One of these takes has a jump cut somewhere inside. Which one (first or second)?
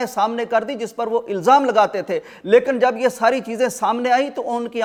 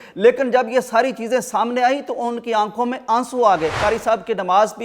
second